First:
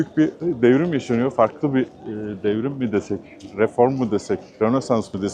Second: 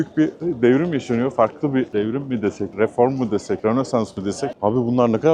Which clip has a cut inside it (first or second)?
second